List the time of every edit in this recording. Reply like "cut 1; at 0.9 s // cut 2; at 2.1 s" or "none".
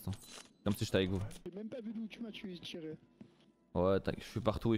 none

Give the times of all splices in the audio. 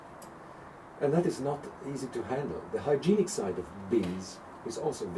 none

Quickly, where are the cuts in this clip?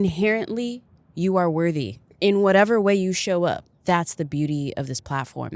cut 1; at 3.7 s

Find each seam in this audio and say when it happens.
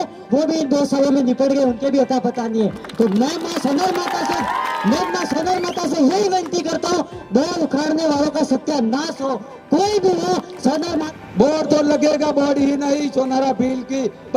cut 1; at 11.1 s

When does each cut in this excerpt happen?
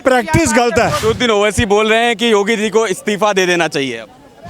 cut 1; at 1.0 s

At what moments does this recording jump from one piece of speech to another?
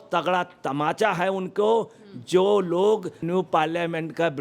cut 1; at 3.2 s

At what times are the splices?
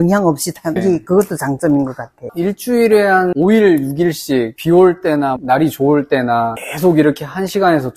cut 1; at 0.8 s // cut 2; at 3.3 s // cut 3; at 6.6 s

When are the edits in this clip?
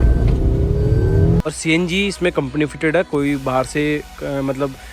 cut 1; at 1.4 s

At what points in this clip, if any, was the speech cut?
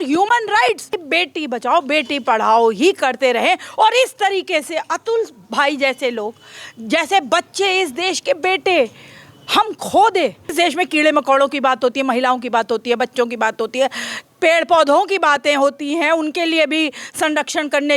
cut 1; at 1.0 s // cut 2; at 10.5 s

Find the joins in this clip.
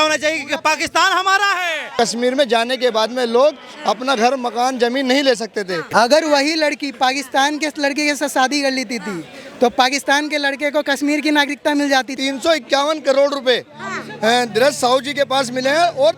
cut 1; at 1.9 s // cut 2; at 5.8 s // cut 3; at 12.2 s

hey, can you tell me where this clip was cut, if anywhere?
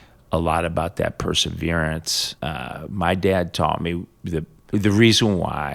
cut 1; at 2.2 s // cut 2; at 4.5 s

